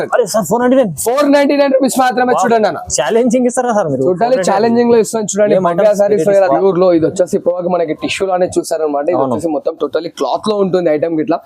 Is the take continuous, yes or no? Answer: no